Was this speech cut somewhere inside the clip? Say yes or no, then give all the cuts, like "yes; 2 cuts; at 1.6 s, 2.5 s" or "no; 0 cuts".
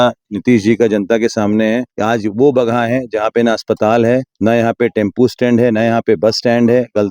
yes; 1 cut; at 1.9 s